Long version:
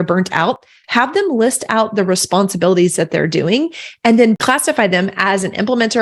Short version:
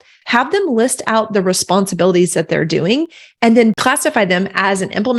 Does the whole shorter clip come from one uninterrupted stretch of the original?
yes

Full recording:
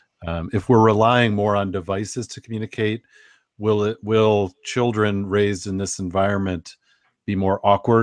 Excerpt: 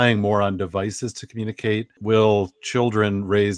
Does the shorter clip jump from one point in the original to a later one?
yes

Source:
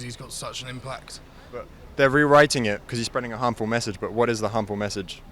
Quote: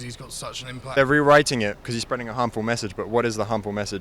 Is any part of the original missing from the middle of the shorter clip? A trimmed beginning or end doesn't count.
yes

